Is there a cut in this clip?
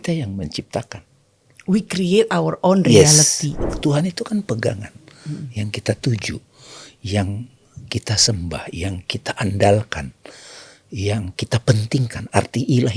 yes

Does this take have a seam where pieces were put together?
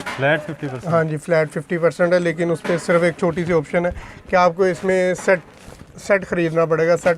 no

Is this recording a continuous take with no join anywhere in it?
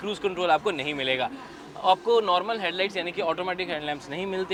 yes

